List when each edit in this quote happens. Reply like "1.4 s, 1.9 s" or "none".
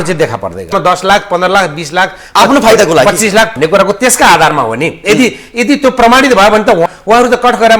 0.7 s, 3.5 s, 6.9 s